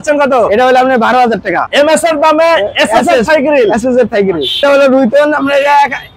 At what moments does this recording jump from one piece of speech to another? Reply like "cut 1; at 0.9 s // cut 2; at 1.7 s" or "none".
cut 1; at 1.7 s // cut 2; at 4.6 s